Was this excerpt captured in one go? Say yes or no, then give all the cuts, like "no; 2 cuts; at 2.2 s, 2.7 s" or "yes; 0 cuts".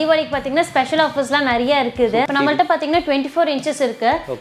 no; 1 cut; at 2.3 s